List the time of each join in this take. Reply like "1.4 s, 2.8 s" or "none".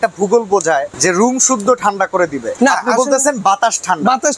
0.9 s, 2.4 s